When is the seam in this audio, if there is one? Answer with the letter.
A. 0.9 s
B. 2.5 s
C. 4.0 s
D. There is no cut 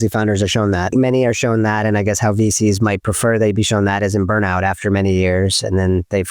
A